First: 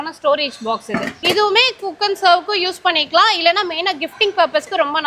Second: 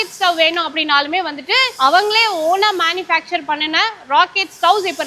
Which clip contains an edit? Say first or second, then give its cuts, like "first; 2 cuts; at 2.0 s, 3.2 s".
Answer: first; 1 cut; at 1.2 s